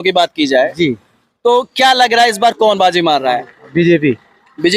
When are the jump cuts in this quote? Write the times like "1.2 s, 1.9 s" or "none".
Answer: none